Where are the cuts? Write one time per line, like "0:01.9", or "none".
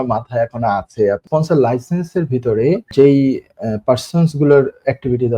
0:01.2
0:02.9